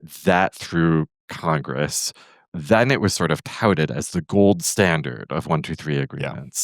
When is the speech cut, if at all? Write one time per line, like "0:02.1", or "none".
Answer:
0:02.5